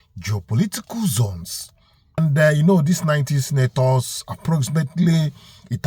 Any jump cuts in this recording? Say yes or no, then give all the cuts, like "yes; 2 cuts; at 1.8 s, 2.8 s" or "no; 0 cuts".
yes; 1 cut; at 2.2 s